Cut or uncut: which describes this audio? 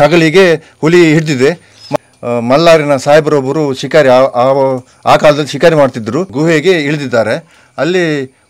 cut